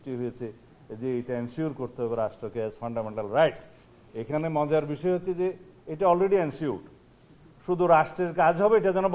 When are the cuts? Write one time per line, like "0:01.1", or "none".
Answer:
none